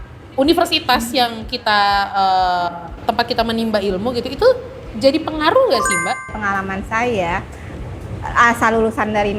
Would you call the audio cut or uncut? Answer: cut